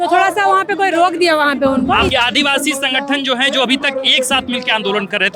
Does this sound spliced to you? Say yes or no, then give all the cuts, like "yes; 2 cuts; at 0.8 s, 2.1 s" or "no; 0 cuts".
yes; 1 cut; at 2.1 s